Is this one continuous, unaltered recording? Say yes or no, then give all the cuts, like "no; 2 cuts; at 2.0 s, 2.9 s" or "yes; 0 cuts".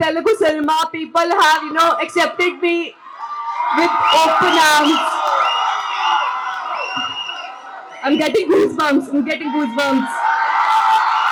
yes; 0 cuts